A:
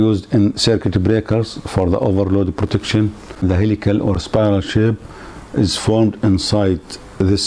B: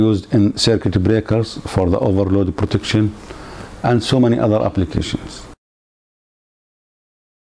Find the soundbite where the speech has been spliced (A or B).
A